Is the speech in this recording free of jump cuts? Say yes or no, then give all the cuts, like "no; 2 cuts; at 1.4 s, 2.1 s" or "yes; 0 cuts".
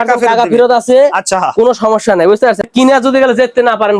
no; 1 cut; at 2.7 s